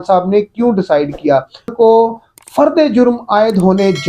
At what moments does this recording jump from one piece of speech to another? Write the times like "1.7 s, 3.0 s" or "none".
1.7 s